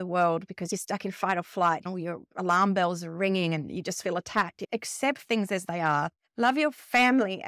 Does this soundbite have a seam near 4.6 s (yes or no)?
yes